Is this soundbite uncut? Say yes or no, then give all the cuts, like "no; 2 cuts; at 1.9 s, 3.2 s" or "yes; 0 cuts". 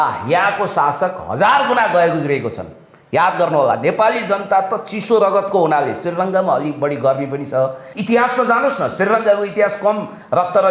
no; 1 cut; at 7.9 s